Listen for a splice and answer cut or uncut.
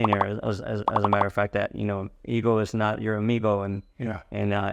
uncut